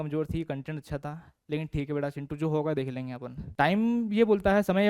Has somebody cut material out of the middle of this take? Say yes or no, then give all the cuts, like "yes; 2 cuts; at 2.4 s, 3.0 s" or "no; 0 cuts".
yes; 1 cut; at 3.4 s